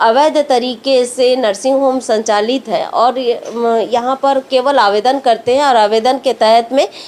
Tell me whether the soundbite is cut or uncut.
uncut